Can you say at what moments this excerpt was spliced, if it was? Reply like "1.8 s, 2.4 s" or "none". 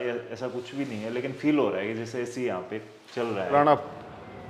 3.5 s